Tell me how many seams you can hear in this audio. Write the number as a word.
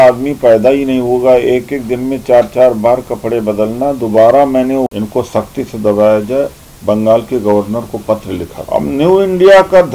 two